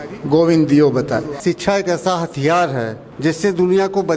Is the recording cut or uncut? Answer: cut